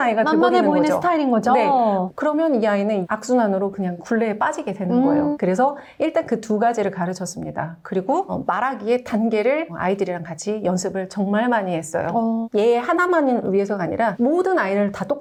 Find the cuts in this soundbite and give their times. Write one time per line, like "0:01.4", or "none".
none